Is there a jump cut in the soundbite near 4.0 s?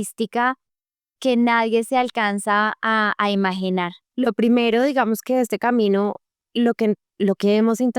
yes; 1 cut; at 4.0 s

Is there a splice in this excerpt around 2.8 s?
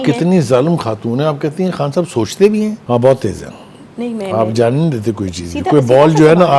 yes; 1 cut; at 2.8 s

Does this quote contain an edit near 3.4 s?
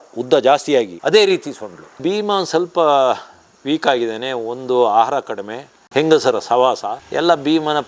no; 1 cut; at 2.0 s

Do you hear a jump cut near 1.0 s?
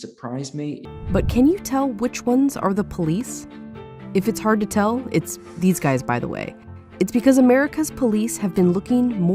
yes; 1 cut; at 1.0 s

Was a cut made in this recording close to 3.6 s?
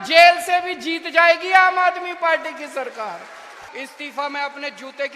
yes; 1 cut; at 3.6 s

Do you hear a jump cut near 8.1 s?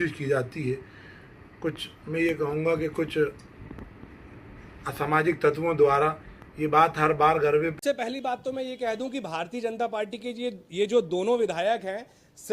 yes; 1 cut; at 8.1 s

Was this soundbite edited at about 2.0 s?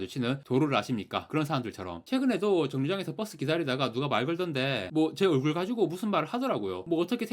yes; 1 cut; at 2.0 s

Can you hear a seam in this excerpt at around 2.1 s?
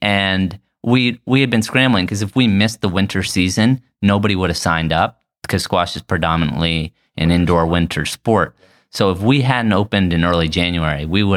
yes; 1 cut; at 2.1 s

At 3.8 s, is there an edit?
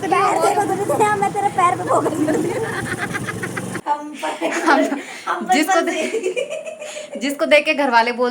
yes; 1 cut; at 3.8 s

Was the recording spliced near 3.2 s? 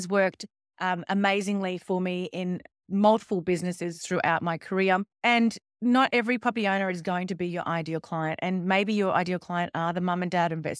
no; 1 cut; at 5.1 s

